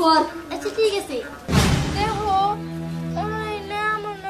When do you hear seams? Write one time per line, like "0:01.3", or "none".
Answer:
0:01.4